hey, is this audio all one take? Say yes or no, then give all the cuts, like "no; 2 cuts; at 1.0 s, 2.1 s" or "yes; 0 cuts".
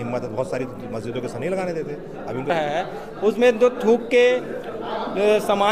no; 1 cut; at 2.5 s